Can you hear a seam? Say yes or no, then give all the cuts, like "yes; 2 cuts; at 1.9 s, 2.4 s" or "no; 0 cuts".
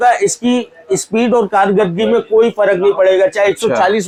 no; 0 cuts